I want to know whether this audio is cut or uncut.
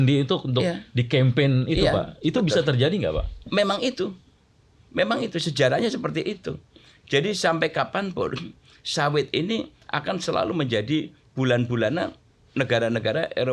uncut